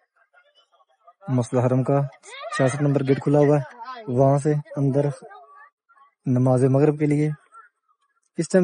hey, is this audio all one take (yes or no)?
yes